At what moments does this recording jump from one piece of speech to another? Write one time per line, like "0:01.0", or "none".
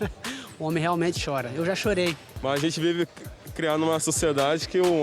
0:02.3